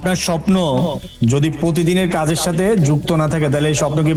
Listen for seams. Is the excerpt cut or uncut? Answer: uncut